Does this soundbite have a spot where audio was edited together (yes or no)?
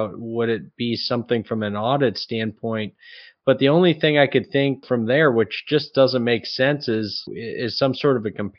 yes